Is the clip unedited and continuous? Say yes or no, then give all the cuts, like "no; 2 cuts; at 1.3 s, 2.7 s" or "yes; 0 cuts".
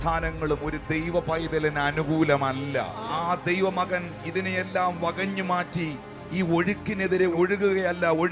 no; 1 cut; at 7.3 s